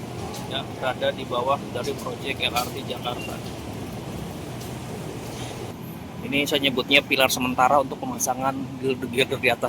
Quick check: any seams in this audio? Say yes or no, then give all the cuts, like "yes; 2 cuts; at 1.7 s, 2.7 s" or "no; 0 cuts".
yes; 1 cut; at 5.7 s